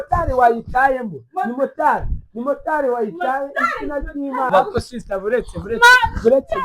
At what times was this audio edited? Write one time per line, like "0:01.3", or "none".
0:04.5